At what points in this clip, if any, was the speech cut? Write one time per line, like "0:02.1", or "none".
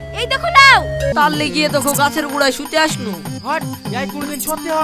0:01.1